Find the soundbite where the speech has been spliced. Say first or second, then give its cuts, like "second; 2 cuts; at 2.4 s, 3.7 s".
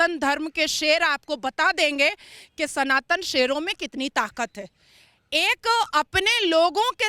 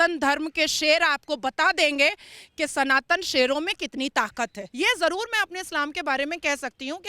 second; 1 cut; at 4.6 s